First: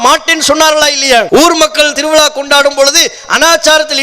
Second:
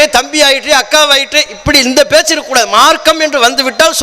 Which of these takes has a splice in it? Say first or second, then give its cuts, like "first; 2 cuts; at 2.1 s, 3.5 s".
first; 1 cut; at 1.3 s